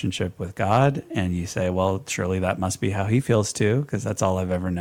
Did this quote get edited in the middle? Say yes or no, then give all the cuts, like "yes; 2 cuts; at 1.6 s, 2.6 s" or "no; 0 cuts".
no; 0 cuts